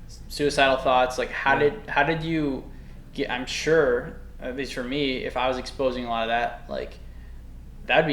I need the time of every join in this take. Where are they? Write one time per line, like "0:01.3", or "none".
none